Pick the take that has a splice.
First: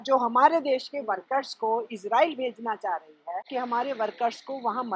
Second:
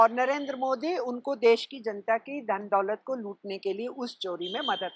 first; 1 cut; at 3.5 s

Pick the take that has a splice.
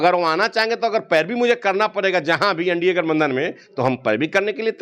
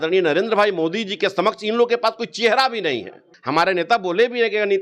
second; 1 cut; at 3.3 s

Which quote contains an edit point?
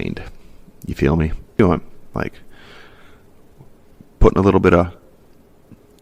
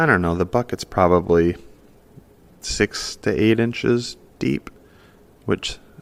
first; 1 cut; at 1.6 s

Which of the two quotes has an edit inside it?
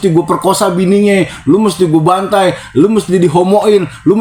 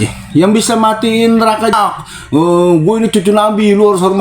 second; 1 cut; at 1.7 s

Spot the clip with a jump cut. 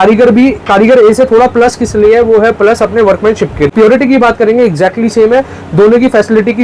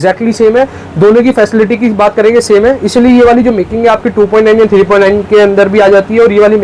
first; 1 cut; at 3.7 s

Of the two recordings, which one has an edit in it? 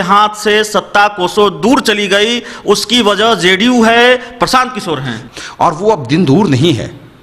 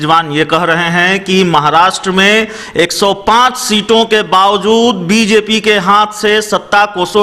first; 1 cut; at 5.2 s

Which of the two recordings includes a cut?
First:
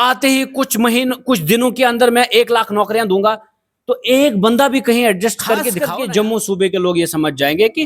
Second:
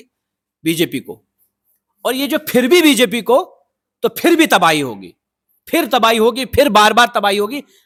first; 1 cut; at 5.8 s

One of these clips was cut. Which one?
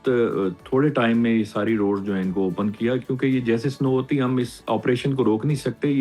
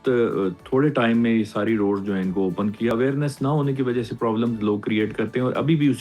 second; 1 cut; at 2.9 s

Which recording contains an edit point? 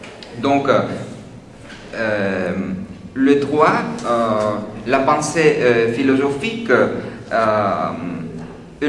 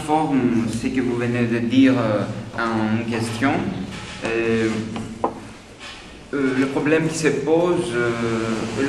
first; 1 cut; at 6.8 s

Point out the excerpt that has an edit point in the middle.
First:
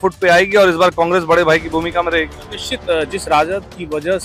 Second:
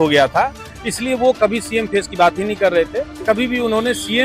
second; 1 cut; at 3.1 s

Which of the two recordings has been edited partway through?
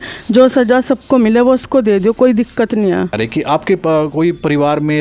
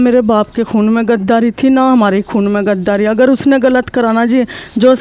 first; 1 cut; at 3.2 s

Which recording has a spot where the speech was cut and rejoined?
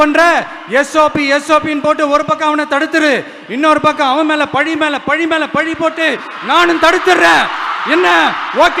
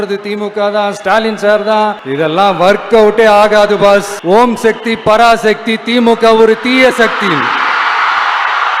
second; 2 cuts; at 2.0 s, 4.1 s

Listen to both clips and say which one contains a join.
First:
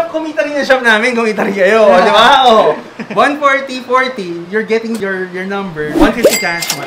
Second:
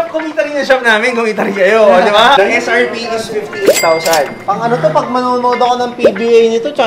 second; 2 cuts; at 2.4 s, 4.4 s

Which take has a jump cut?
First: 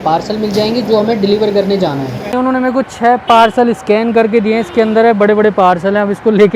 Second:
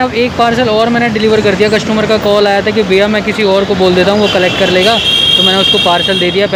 first; 1 cut; at 2.3 s

